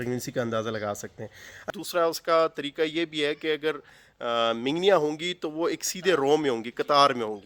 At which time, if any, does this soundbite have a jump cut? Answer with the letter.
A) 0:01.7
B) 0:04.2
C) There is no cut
A